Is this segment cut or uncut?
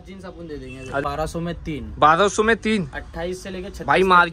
cut